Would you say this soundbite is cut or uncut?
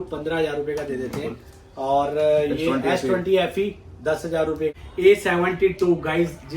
cut